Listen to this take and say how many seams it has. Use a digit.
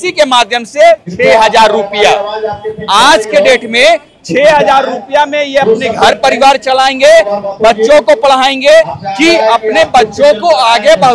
0